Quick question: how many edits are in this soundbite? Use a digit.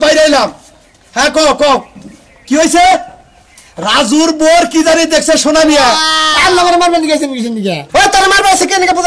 1